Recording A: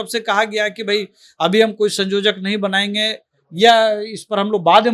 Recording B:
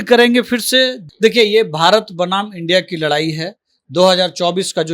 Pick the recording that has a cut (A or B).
B